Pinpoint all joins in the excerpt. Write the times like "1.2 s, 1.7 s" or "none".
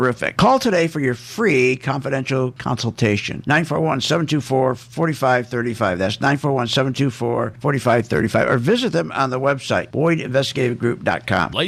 none